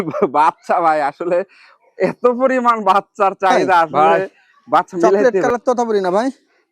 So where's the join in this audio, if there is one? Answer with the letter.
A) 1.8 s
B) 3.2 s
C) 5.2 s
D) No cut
C